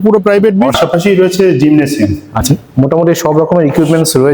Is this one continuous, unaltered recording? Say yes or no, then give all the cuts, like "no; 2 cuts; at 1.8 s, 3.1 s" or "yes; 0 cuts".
no; 2 cuts; at 0.8 s, 2.4 s